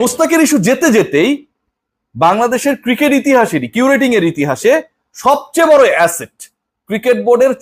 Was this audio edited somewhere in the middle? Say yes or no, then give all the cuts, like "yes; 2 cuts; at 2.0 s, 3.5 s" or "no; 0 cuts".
no; 0 cuts